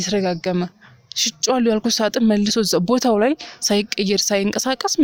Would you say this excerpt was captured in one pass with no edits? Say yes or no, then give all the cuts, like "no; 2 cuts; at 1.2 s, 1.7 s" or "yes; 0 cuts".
yes; 0 cuts